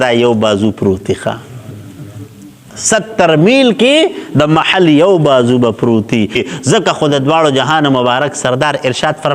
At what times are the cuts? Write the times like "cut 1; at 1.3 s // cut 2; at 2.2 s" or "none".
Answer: cut 1; at 6.4 s